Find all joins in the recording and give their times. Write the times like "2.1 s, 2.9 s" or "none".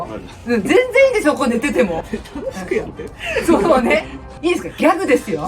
4.2 s